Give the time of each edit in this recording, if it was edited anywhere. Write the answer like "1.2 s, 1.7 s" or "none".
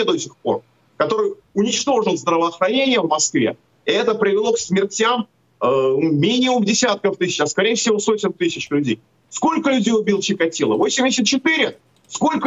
none